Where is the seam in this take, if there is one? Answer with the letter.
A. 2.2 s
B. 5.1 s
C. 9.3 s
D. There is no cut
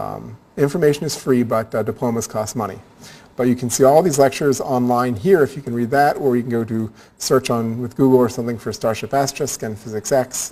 D